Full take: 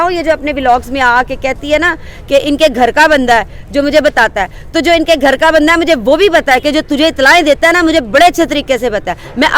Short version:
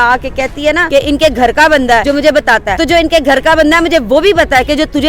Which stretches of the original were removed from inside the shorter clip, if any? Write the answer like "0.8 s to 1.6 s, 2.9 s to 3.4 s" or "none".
1.9 s to 2.2 s, 3.7 s to 4.3 s